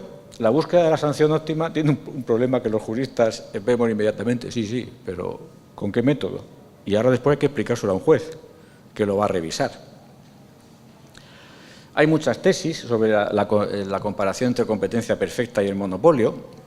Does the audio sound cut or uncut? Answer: uncut